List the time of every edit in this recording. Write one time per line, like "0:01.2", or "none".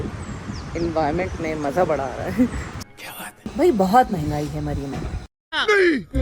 0:03.4